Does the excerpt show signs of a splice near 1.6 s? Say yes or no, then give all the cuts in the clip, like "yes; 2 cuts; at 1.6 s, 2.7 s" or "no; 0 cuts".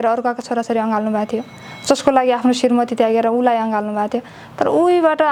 no; 0 cuts